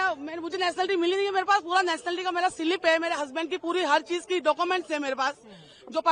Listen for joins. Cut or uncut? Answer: uncut